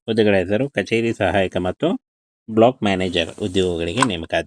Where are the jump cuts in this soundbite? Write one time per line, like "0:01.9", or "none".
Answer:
none